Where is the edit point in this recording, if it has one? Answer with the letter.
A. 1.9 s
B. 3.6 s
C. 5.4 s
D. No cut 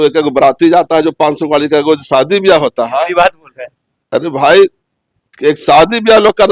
D